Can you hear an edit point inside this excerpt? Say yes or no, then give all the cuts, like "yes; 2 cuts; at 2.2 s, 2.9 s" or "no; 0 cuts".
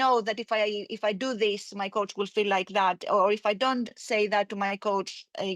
no; 0 cuts